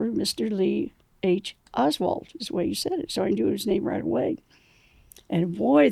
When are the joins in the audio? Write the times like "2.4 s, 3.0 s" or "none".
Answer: none